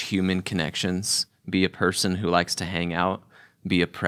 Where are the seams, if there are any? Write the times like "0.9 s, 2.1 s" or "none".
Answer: none